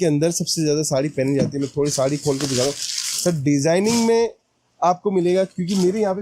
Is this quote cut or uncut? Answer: uncut